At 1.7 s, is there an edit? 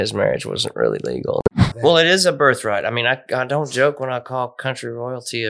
yes; 1 cut; at 1.7 s

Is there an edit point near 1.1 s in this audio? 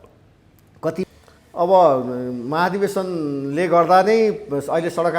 yes; 1 cut; at 1.1 s

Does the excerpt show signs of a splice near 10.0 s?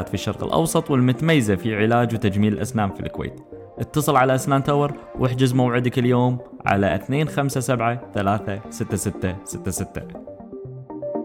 yes; 1 cut; at 10.0 s

